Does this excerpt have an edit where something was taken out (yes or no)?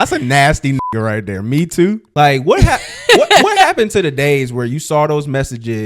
yes